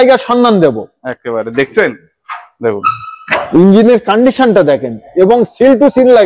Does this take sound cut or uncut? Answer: uncut